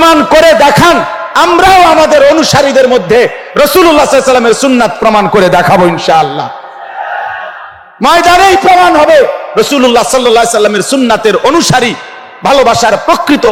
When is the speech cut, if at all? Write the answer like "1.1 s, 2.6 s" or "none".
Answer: none